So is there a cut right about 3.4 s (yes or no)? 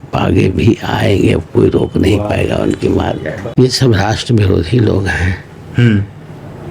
yes